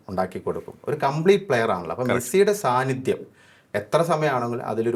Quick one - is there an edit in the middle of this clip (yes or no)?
no